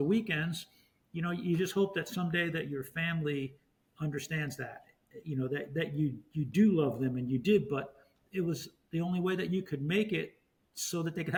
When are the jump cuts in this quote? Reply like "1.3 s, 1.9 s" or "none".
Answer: none